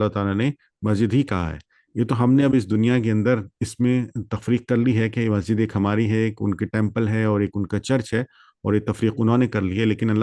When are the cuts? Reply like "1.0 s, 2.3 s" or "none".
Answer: none